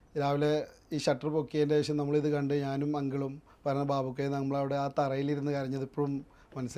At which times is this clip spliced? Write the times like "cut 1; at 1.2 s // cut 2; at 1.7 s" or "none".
none